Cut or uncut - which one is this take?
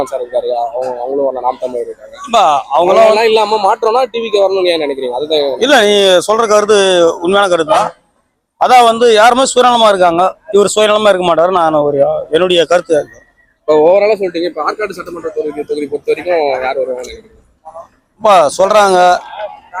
uncut